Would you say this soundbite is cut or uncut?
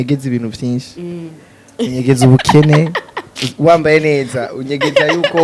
uncut